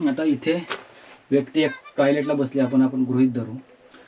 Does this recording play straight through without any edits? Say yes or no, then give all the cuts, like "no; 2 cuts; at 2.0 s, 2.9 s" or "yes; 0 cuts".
yes; 0 cuts